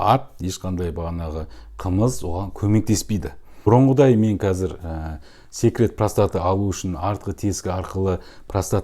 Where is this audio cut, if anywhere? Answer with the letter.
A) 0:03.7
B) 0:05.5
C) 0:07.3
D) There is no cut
A